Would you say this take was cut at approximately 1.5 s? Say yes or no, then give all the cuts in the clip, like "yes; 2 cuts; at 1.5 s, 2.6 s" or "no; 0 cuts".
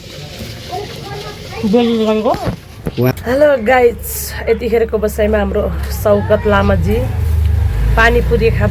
no; 1 cut; at 3.1 s